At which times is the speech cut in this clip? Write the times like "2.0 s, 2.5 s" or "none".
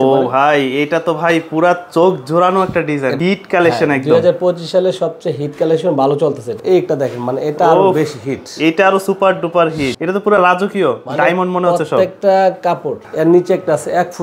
3.2 s, 6.6 s, 9.9 s, 13.0 s